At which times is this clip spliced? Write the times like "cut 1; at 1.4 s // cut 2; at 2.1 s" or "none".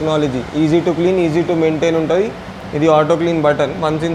none